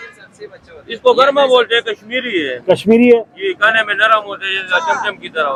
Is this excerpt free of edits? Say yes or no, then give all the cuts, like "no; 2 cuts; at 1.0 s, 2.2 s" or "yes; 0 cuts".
yes; 0 cuts